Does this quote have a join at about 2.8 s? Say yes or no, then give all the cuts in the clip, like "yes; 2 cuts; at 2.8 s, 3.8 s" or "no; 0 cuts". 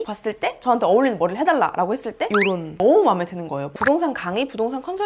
yes; 2 cuts; at 2.8 s, 3.6 s